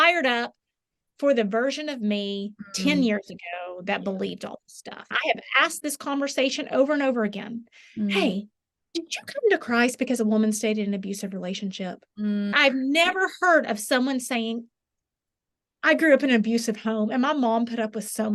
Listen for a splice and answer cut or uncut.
cut